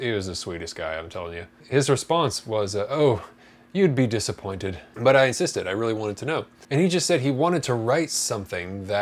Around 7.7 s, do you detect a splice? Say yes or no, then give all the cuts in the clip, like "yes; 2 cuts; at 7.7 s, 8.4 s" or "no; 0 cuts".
no; 1 cut; at 1.5 s